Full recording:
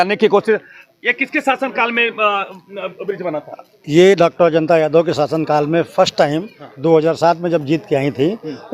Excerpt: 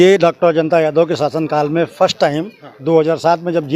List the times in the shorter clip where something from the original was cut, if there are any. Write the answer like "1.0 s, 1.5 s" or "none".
none